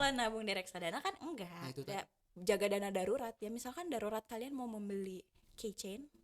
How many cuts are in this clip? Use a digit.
1